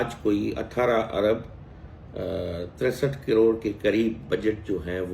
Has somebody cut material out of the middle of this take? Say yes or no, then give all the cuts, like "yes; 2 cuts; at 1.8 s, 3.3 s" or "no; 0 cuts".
no; 0 cuts